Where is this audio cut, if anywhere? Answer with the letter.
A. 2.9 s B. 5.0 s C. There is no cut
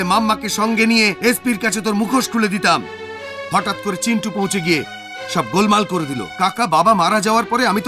C